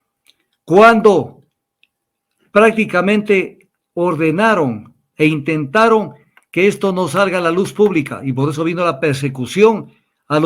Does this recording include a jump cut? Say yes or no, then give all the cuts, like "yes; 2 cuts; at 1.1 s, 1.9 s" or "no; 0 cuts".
no; 0 cuts